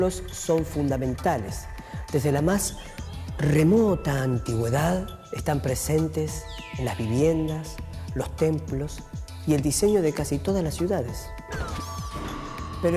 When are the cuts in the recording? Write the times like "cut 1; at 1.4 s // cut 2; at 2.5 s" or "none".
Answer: cut 1; at 3.7 s